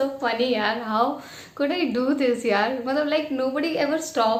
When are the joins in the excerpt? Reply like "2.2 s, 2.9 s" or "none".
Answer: none